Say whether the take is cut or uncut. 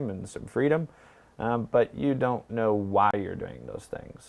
uncut